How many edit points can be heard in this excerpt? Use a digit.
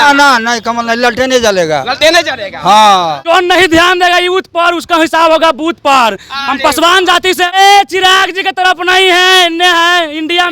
2